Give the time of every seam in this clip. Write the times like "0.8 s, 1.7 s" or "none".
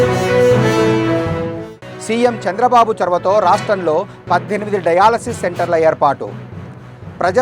1.6 s